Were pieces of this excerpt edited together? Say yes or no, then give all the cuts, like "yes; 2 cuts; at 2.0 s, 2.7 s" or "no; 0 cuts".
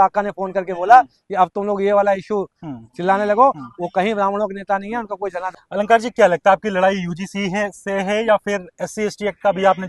yes; 1 cut; at 5.4 s